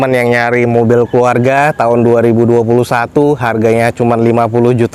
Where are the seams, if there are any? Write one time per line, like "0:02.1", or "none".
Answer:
none